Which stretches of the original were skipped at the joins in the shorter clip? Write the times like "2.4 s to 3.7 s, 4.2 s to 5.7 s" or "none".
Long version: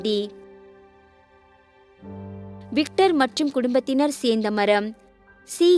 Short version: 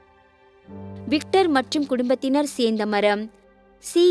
2.4 s to 2.7 s